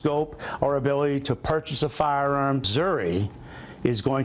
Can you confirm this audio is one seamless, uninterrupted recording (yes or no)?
no